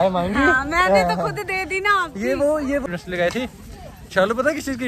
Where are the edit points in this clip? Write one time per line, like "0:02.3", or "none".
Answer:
0:02.8